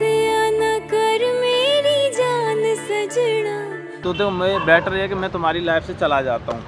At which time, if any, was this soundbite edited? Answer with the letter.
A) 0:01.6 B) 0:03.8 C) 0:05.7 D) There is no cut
B